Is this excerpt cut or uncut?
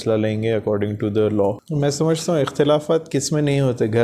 cut